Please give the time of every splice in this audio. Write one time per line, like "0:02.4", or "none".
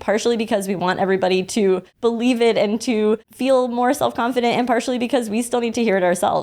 0:01.9
0:03.3